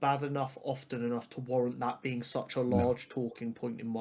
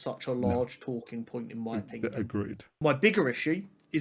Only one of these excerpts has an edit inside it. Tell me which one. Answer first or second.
second